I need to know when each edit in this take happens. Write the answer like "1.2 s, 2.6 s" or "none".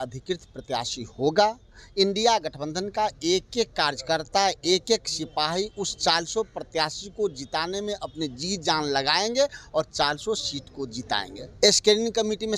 11.4 s